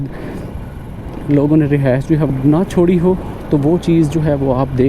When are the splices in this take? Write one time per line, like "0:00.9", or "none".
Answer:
0:02.3